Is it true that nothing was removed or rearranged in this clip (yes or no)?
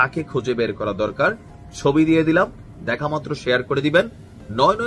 yes